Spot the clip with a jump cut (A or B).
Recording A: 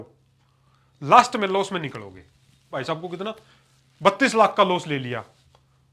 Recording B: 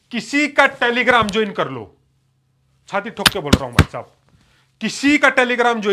A